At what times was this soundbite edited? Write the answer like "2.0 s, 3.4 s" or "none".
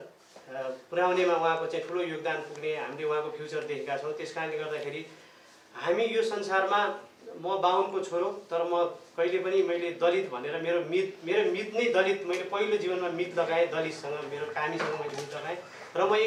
none